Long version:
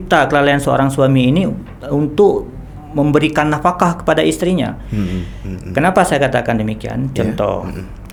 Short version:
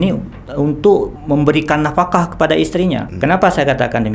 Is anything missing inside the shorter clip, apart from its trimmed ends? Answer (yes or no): yes